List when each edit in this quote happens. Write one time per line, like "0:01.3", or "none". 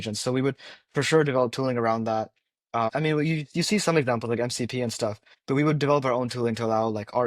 0:02.9
0:05.3

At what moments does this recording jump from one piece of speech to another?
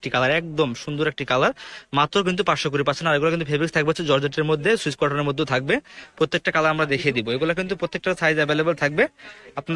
none

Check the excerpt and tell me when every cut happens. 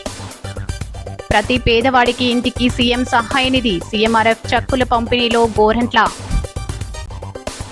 0:01.2
0:06.4

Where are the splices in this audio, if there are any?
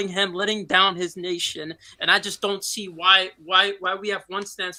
none

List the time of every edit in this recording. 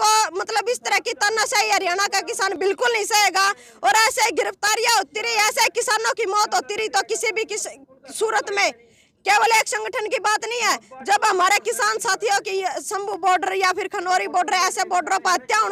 none

